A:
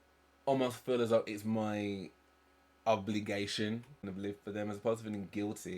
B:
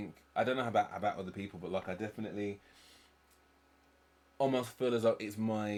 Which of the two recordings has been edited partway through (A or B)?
A